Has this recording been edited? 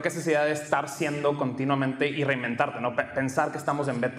no; 0 cuts

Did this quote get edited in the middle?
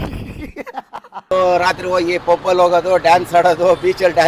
yes; 1 cut; at 1.3 s

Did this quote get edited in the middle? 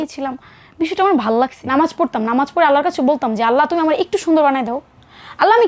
yes; 1 cut; at 1.6 s

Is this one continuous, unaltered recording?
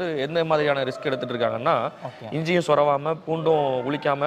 yes; 0 cuts

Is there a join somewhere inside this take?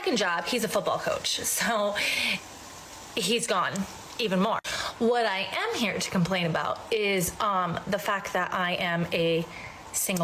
yes; 1 cut; at 4.8 s

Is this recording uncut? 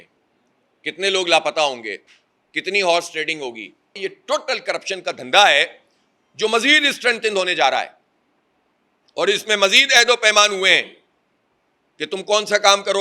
no; 1 cut; at 4.1 s

